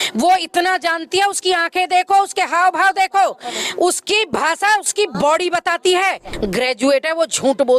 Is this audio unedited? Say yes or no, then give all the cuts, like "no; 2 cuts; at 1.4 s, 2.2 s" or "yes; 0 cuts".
no; 1 cut; at 6.3 s